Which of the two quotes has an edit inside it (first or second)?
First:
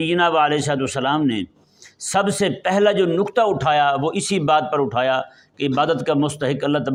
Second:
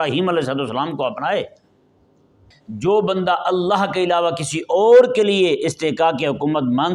second